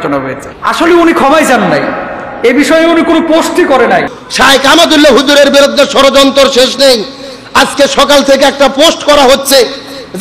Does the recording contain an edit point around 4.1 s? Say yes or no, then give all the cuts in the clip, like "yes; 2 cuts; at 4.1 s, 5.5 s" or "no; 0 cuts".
yes; 1 cut; at 4.1 s